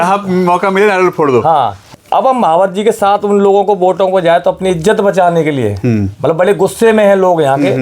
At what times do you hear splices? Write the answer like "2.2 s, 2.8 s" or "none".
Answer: 1.8 s